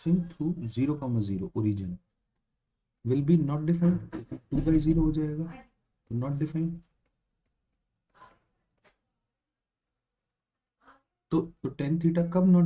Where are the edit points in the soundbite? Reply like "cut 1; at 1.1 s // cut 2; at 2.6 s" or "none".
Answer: cut 1; at 11.5 s